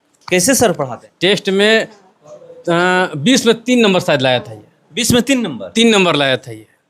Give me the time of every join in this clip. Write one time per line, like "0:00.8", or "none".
0:01.0